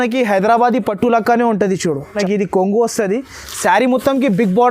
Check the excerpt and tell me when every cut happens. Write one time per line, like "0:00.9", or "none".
0:02.2